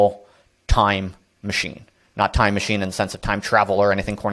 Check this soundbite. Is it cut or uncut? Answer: uncut